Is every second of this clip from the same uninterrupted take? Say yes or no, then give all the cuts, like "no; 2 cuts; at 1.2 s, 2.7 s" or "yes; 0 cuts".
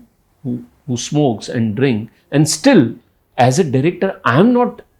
yes; 0 cuts